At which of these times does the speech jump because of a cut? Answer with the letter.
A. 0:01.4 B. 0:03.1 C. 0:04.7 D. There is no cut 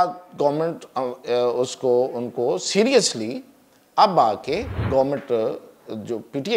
C